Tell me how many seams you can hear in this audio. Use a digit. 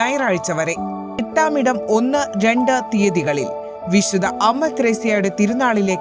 1